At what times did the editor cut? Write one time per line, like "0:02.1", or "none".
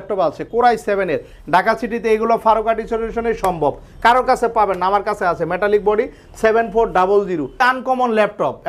0:07.6